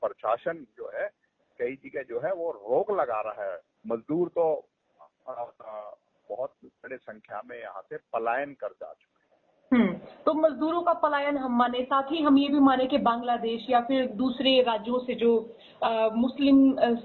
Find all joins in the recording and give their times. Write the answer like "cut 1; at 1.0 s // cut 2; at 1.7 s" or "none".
cut 1; at 3.7 s